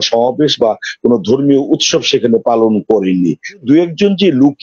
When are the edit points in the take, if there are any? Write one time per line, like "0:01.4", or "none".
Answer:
0:03.6